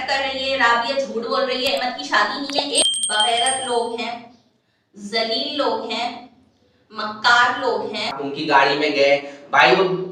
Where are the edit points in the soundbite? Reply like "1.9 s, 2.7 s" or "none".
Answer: 2.8 s, 8.2 s